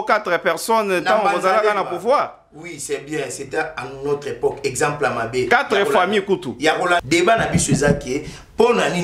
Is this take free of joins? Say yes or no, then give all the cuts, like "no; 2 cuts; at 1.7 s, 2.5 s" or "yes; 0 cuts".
no; 1 cut; at 7.0 s